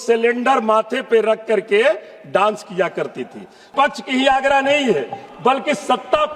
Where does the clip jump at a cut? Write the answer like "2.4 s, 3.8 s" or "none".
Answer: 3.7 s